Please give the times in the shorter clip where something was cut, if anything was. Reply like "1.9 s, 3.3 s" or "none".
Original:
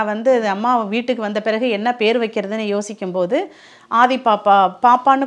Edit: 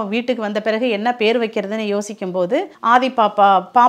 2.7 s